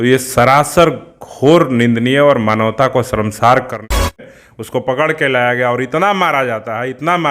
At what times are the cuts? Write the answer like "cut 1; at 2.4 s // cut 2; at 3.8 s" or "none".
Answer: cut 1; at 3.9 s